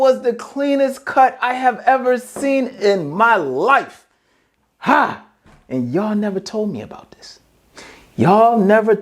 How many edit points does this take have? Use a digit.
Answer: 0